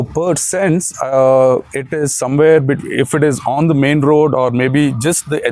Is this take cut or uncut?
uncut